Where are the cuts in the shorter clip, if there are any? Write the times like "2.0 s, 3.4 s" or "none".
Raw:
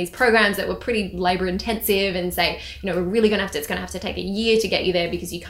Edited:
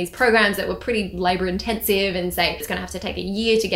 2.7 s